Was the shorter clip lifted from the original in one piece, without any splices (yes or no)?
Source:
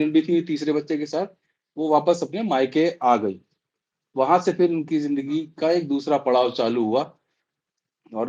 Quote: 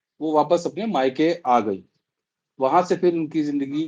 yes